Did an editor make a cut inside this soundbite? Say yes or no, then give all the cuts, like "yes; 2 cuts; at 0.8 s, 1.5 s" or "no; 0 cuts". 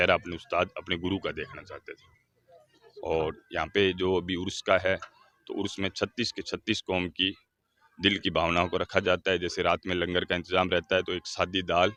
no; 0 cuts